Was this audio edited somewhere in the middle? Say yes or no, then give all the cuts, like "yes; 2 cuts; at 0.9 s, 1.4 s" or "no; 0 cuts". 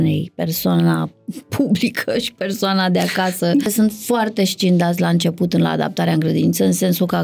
yes; 1 cut; at 3.7 s